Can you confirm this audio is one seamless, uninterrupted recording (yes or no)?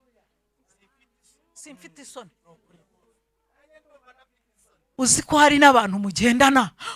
no